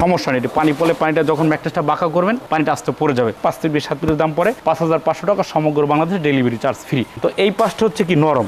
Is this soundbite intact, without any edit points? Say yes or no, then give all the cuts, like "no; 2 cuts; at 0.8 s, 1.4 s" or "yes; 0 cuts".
no; 2 cuts; at 3.4 s, 7.1 s